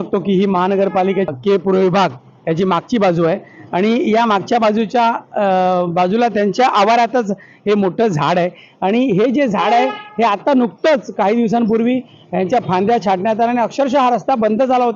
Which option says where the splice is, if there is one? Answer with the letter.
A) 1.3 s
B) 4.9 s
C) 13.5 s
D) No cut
A